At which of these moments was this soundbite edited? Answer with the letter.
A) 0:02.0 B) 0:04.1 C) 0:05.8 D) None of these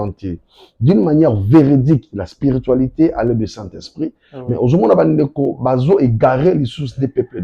D